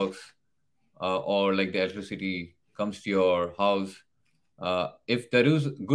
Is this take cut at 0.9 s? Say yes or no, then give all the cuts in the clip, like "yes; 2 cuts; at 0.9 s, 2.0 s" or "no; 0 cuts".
no; 0 cuts